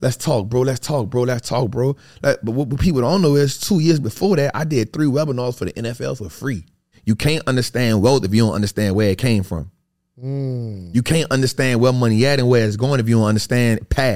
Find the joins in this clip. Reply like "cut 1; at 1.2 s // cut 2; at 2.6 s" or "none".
cut 1; at 6.9 s